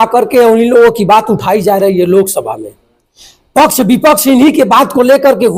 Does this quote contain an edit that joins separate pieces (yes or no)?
no